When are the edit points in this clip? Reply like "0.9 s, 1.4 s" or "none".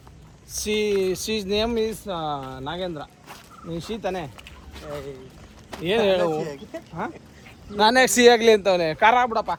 none